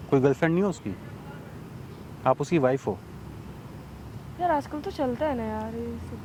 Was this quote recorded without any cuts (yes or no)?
yes